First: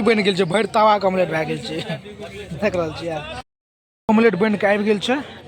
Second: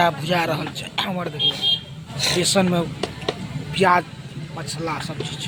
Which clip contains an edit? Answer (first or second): first